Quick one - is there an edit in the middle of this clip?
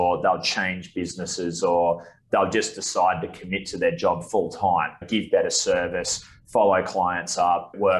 no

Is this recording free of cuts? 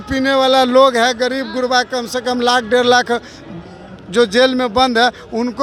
yes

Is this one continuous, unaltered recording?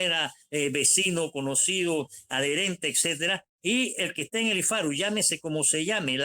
yes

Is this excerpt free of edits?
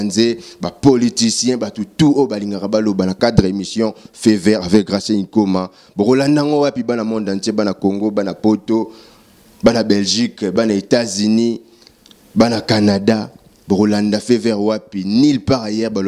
yes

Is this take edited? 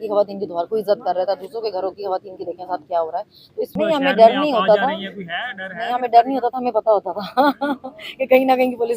yes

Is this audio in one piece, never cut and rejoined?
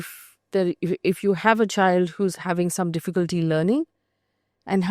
yes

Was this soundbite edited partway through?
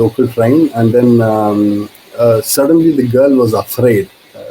no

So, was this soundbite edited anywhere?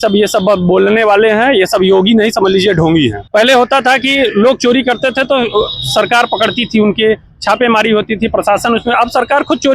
yes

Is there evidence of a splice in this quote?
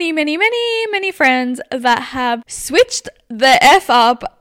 yes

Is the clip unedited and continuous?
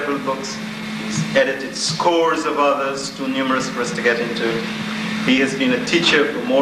no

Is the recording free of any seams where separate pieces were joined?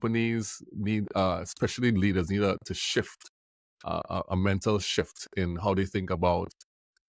yes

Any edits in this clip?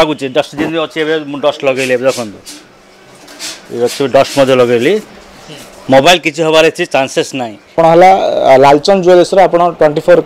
yes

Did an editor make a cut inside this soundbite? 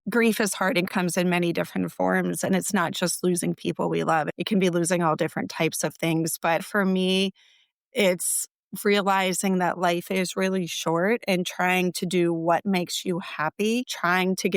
yes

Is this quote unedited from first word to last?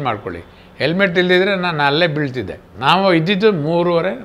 no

